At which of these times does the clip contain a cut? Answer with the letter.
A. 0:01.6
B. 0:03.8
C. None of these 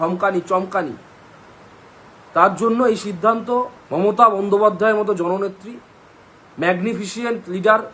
B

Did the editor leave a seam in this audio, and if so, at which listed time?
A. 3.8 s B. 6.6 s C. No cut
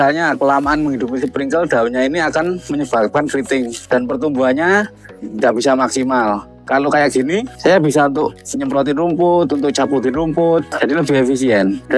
B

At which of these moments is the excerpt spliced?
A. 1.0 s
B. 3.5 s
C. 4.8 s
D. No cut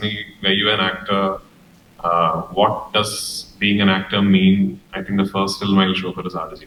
D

